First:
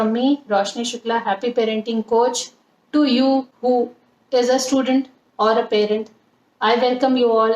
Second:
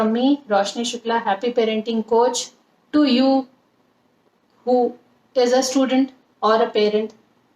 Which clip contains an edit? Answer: first; 1 cut; at 3.5 s

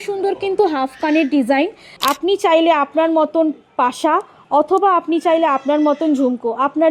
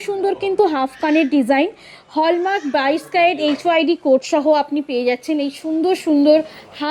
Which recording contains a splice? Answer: first; 1 cut; at 1.9 s

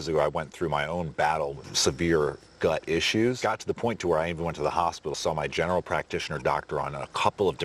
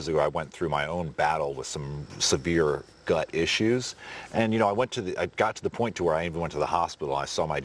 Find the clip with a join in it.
first; 3 cuts; at 1.7 s, 3.4 s, 5.1 s

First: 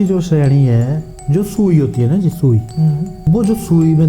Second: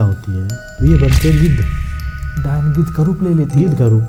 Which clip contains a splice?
first; 2 cuts; at 1.1 s, 3.2 s

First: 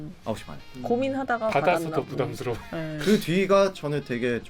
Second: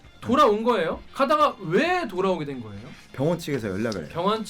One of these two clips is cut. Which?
second; 1 cut; at 1.0 s

